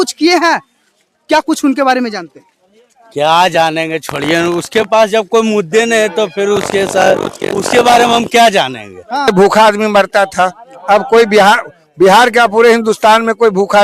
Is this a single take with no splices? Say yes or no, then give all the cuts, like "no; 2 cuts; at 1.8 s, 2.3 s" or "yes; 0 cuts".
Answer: no; 1 cut; at 9.3 s